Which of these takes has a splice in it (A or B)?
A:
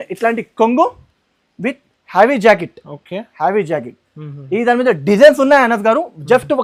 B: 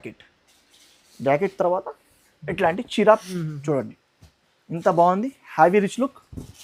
B